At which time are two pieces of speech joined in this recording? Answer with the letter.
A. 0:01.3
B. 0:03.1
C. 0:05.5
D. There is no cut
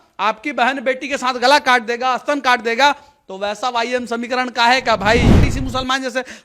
C